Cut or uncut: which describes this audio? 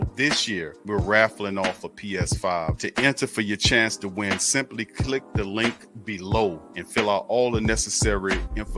uncut